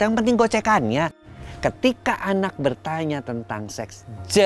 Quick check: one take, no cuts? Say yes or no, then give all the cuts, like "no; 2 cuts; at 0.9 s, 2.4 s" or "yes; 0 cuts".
no; 1 cut; at 1.4 s